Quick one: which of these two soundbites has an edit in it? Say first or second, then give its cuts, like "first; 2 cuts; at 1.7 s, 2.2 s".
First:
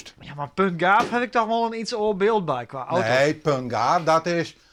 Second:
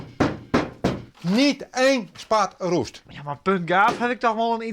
second; 1 cut; at 1.1 s